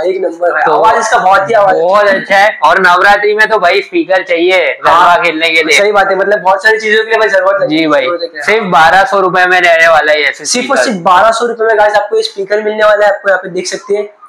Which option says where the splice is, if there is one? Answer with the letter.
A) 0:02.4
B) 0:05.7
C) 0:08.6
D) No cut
D